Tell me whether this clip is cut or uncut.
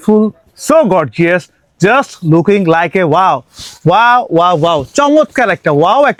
uncut